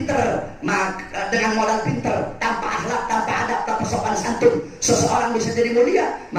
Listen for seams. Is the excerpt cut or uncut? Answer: uncut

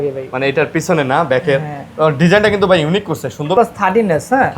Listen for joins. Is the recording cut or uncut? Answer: cut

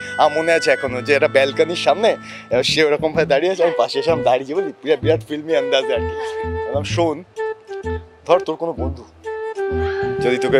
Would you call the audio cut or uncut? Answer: uncut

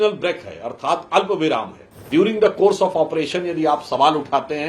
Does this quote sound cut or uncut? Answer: cut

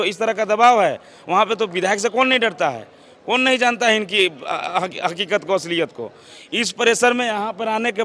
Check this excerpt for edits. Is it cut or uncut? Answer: uncut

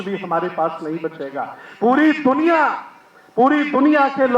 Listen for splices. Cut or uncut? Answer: uncut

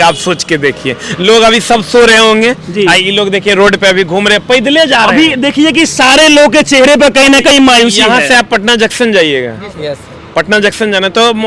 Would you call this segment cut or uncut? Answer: uncut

